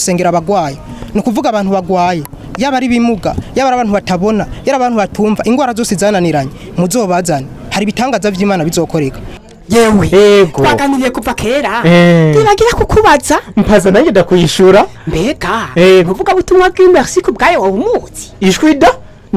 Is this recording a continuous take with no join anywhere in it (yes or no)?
no